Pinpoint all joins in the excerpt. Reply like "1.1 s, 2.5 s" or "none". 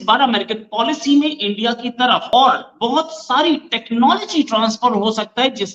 2.2 s